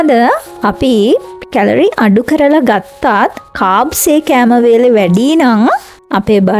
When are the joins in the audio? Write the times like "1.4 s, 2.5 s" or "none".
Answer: none